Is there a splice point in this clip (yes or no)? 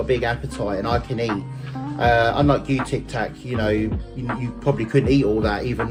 no